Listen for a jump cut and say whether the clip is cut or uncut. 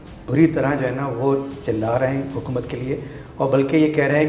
uncut